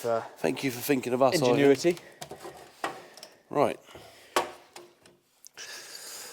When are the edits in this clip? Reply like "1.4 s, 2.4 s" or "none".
none

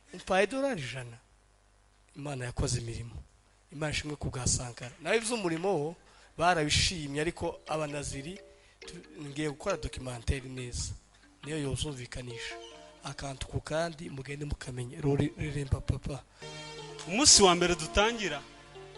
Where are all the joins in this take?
16.5 s

